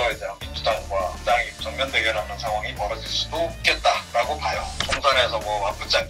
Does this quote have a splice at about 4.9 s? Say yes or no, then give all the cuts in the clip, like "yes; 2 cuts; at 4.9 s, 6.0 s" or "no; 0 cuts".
yes; 1 cut; at 4.9 s